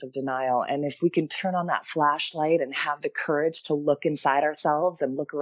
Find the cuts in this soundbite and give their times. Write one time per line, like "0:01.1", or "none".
none